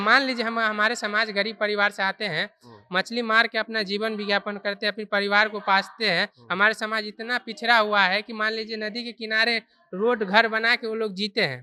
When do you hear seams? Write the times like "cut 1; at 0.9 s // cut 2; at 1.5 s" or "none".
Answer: none